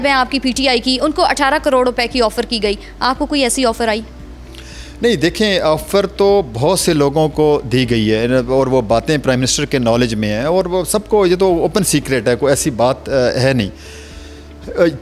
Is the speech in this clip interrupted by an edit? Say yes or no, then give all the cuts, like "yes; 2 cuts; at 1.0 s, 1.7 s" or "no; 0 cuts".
no; 0 cuts